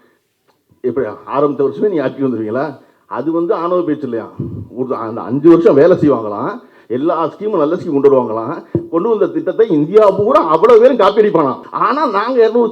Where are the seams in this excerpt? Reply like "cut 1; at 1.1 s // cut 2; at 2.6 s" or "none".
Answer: cut 1; at 11.7 s